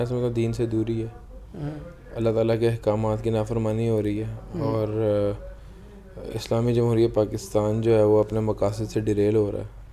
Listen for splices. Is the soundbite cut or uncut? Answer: uncut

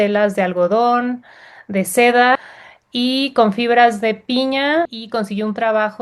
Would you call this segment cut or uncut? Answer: cut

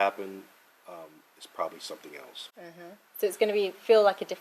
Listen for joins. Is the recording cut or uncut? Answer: uncut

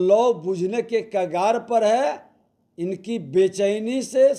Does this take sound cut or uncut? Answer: uncut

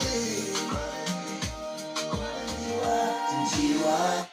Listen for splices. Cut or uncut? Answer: cut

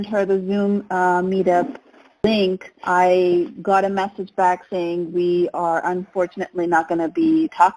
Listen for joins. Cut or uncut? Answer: cut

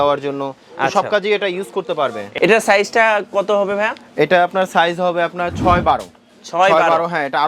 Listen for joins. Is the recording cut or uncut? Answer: cut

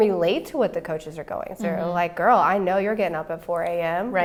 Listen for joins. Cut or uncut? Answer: uncut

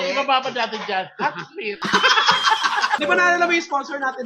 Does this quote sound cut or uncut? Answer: uncut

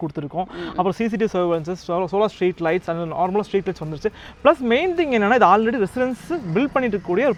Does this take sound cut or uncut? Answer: uncut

